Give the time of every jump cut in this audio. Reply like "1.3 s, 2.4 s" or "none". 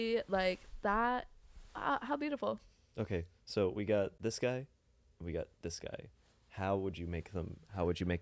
none

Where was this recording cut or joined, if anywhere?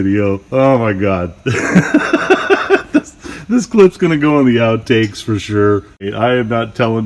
6.1 s

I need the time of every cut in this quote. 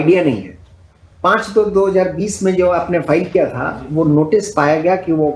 none

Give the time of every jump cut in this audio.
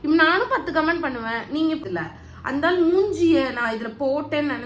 1.8 s

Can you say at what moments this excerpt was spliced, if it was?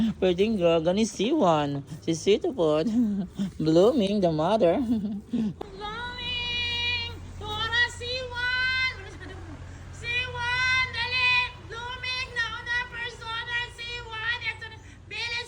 5.6 s

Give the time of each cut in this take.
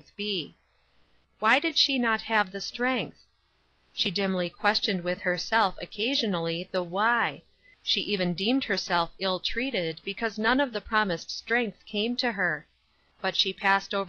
10.8 s

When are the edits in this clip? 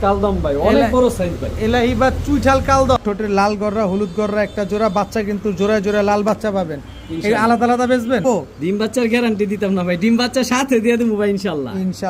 3.0 s, 8.2 s

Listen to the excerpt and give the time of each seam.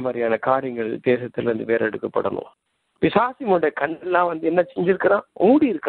2.7 s

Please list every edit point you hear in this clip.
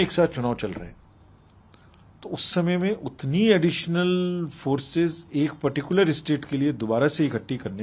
none

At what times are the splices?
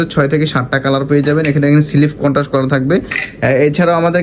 none

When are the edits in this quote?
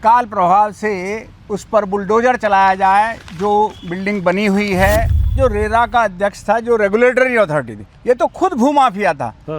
5.3 s

